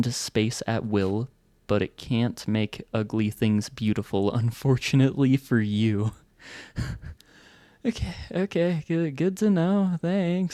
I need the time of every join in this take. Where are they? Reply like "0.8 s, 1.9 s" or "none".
none